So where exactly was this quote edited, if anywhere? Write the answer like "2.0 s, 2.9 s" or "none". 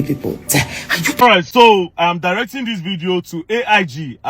1.1 s